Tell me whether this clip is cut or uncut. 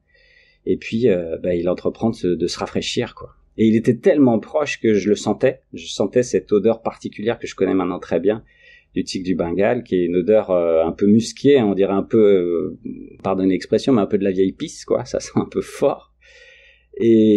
uncut